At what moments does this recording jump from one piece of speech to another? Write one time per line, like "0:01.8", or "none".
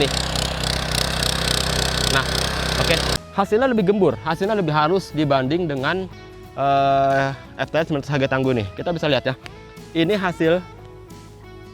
0:03.1